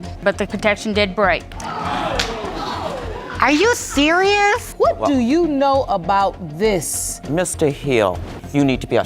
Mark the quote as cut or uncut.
cut